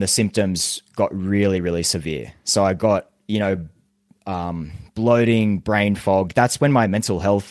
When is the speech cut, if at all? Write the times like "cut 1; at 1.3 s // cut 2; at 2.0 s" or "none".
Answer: none